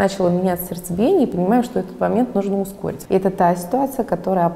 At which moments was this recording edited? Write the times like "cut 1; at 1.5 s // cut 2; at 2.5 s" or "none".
cut 1; at 2.9 s